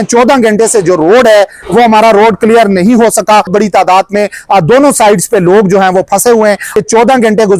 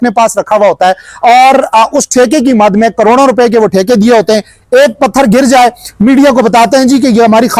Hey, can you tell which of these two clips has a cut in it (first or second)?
first